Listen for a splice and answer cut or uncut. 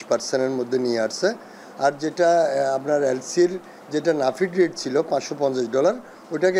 uncut